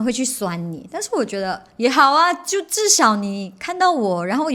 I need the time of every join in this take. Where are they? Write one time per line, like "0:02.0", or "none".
none